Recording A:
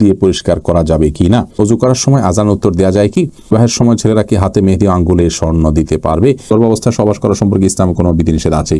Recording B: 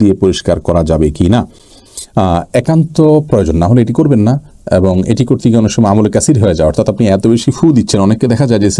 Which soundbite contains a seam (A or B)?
A